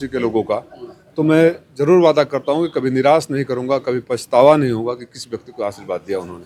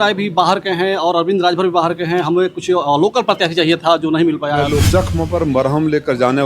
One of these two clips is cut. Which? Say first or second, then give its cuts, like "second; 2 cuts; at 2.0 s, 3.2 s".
second; 1 cut; at 4.8 s